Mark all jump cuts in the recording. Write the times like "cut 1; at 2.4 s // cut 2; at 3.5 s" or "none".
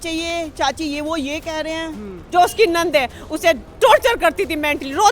cut 1; at 2.2 s

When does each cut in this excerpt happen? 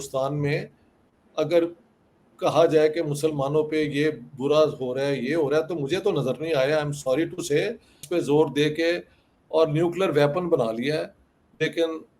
cut 1; at 8.0 s

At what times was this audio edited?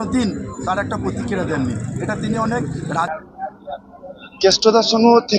cut 1; at 3.1 s

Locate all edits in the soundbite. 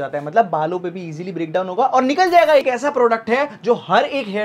cut 1; at 2.6 s

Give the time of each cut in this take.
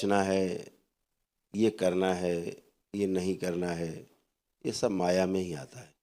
none

